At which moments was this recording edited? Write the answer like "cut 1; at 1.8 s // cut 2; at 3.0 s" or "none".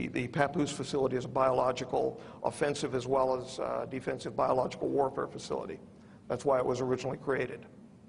cut 1; at 4.0 s